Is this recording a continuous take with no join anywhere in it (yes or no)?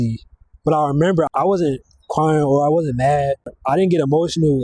no